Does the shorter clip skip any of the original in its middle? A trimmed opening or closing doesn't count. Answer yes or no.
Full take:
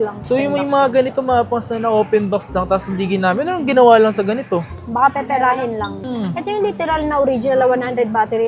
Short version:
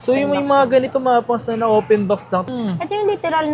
yes